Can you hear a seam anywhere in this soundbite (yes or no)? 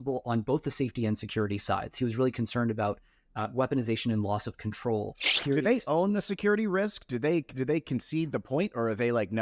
yes